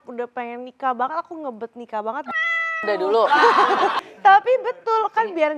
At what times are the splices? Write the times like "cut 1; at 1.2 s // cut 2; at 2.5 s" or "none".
cut 1; at 4.1 s